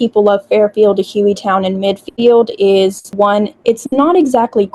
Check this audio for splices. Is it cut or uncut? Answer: cut